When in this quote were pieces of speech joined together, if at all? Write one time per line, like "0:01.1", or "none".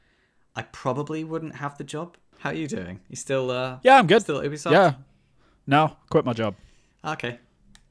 0:02.2